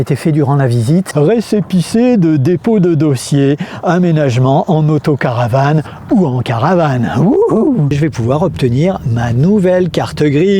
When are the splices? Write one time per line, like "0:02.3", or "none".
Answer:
0:01.1
0:07.9